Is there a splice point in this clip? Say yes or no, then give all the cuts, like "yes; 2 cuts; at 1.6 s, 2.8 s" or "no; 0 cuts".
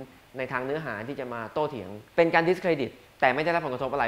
yes; 1 cut; at 2.0 s